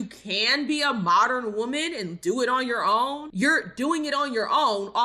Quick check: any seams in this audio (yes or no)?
yes